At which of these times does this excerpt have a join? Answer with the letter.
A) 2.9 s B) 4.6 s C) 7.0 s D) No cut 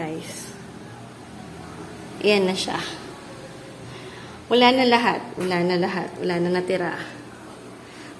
D